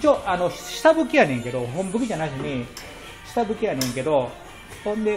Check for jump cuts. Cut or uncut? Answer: uncut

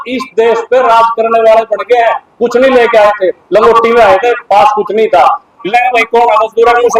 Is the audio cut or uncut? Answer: cut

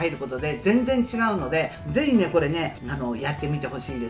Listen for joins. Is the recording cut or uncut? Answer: cut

